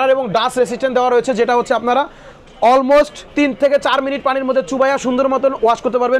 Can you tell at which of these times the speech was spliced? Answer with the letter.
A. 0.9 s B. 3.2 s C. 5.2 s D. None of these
B